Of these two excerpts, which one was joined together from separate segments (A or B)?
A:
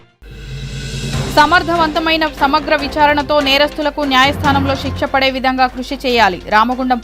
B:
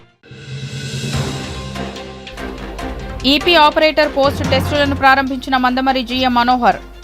A